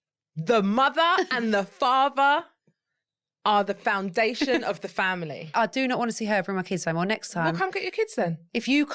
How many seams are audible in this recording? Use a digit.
1